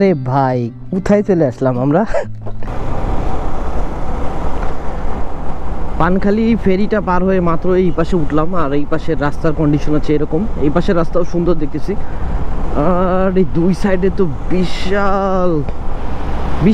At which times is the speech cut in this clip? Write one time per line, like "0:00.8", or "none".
0:02.5